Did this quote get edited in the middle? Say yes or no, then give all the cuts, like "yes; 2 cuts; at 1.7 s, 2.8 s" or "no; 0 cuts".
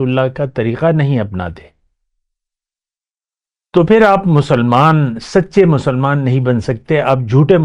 no; 0 cuts